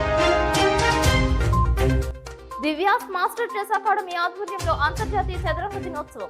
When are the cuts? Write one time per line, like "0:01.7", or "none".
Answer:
0:02.5